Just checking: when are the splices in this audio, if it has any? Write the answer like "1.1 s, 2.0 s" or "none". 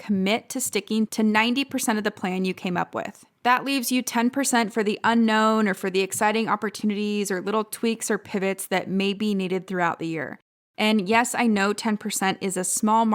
1.1 s, 3.2 s